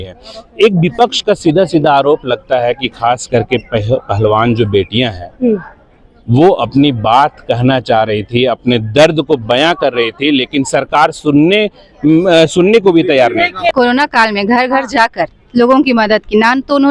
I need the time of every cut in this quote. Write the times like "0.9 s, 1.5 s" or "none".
13.7 s